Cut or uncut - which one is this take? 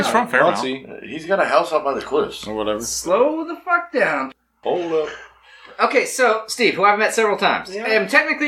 cut